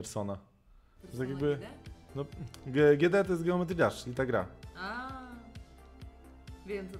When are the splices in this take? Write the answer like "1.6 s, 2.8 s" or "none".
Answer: none